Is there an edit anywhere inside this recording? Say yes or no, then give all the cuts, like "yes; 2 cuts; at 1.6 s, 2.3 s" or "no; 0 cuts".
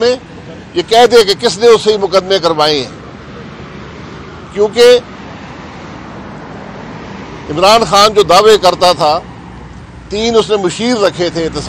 no; 0 cuts